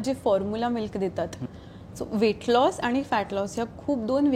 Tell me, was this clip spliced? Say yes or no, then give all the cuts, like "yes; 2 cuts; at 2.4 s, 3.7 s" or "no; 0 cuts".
yes; 1 cut; at 1.4 s